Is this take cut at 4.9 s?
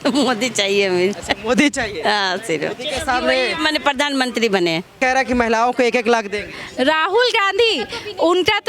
yes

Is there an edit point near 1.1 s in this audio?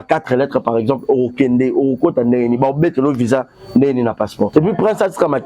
no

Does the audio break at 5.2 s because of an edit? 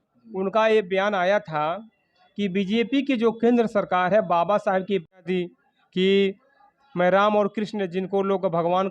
yes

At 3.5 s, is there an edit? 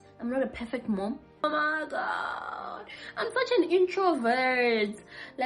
no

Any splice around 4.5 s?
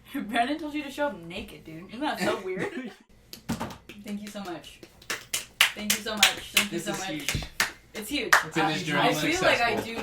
no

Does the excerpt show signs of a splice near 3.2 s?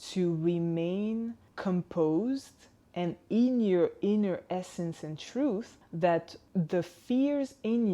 no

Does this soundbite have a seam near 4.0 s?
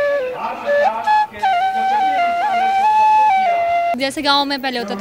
yes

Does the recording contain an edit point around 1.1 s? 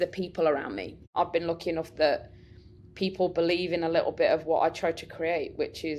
yes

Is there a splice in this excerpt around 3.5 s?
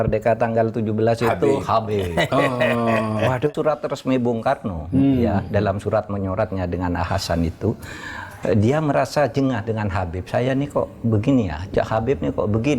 yes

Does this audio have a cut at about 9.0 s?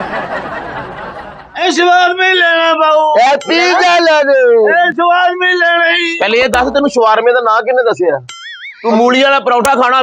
no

